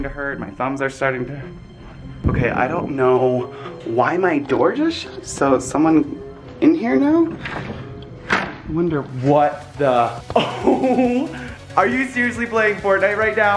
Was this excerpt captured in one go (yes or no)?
no